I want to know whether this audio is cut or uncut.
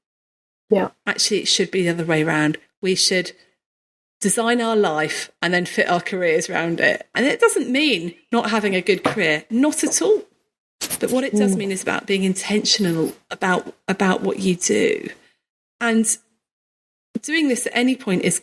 cut